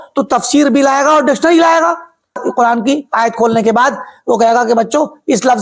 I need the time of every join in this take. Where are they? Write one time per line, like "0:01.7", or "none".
0:02.4